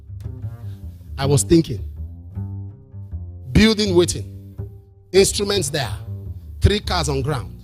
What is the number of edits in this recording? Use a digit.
0